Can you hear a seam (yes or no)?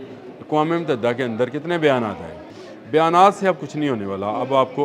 yes